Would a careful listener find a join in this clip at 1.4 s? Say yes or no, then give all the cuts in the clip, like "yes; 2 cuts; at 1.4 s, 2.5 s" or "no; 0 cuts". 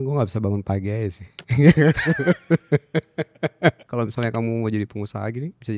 no; 1 cut; at 3.8 s